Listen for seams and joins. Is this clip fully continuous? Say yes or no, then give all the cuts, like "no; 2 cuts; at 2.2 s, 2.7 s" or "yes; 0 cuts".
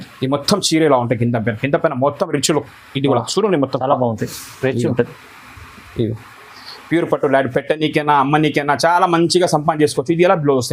yes; 0 cuts